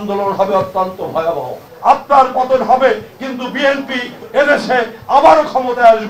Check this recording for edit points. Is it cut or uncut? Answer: cut